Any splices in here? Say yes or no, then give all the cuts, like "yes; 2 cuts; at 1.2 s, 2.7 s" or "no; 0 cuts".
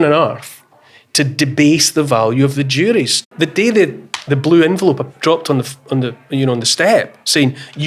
yes; 1 cut; at 3.3 s